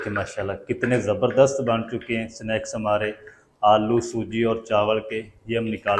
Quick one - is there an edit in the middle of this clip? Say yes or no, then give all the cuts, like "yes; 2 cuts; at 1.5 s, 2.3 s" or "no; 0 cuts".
no; 0 cuts